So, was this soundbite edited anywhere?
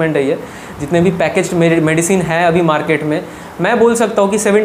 no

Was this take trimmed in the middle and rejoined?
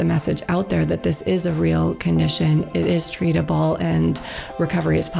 no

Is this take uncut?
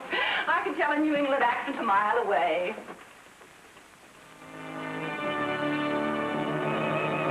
no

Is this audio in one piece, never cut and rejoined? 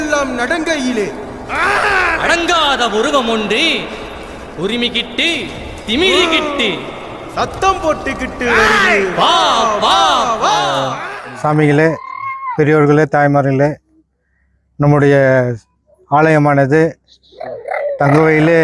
no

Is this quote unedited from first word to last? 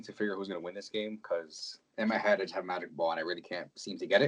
yes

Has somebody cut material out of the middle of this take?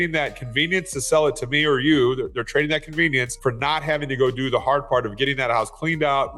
yes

